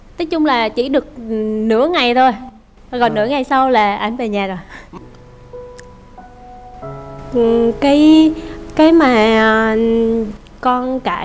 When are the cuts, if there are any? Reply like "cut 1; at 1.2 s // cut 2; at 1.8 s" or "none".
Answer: cut 1; at 4.8 s